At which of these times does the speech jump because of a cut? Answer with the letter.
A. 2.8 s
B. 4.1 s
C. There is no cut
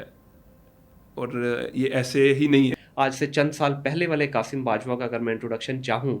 A